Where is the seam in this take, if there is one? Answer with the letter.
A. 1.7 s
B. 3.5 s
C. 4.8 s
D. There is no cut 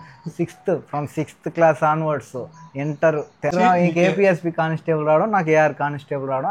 B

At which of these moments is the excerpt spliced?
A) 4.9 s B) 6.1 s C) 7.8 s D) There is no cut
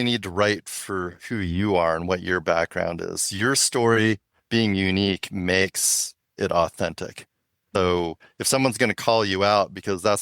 C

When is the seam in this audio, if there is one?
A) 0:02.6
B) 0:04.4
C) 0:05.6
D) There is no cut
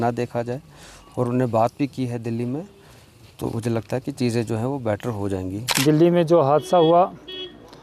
C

